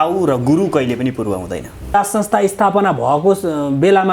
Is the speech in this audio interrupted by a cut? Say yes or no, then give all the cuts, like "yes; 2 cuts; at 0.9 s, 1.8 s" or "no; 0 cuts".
yes; 1 cut; at 1.9 s